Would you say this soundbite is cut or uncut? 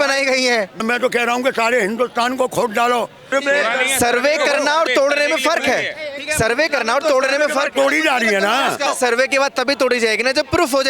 cut